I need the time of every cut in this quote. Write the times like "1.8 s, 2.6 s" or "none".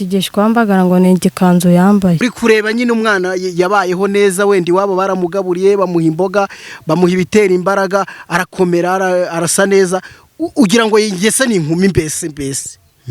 2.2 s